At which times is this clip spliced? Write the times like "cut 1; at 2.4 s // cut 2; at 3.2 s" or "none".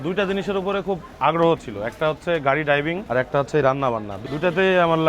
cut 1; at 1.1 s // cut 2; at 3.0 s // cut 3; at 4.2 s